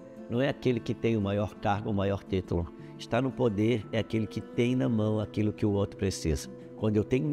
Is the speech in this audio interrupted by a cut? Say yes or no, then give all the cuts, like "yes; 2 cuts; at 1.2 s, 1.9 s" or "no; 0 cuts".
no; 0 cuts